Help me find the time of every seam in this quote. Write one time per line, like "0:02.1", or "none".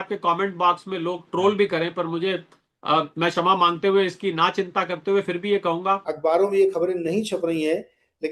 0:06.1